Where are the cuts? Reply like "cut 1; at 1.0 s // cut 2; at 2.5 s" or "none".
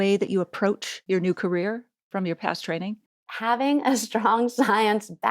cut 1; at 0.9 s // cut 2; at 1.9 s // cut 3; at 3.3 s